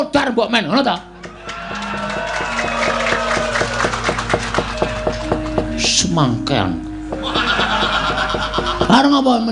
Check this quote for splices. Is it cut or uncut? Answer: uncut